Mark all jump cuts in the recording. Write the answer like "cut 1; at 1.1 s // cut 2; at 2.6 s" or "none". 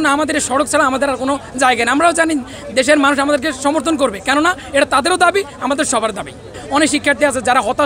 cut 1; at 6.6 s